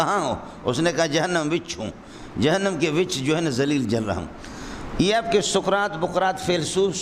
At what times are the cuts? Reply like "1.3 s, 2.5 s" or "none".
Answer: none